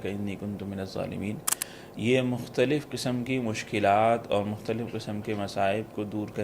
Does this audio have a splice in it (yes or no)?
no